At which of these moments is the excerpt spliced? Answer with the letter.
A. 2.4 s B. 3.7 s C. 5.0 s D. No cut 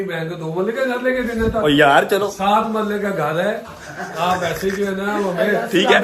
D